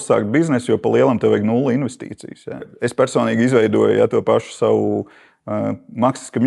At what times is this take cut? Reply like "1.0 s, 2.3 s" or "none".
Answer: 2.7 s